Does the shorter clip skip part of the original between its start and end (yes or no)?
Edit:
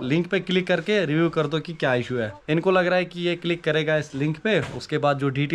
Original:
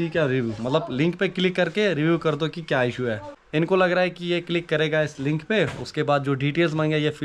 yes